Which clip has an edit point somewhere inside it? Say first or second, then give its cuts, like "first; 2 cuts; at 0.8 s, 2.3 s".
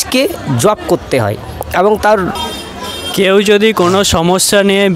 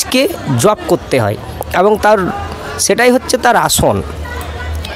first; 1 cut; at 2.5 s